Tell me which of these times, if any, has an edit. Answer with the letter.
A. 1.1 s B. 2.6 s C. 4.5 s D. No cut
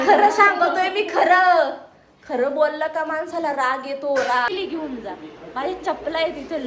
C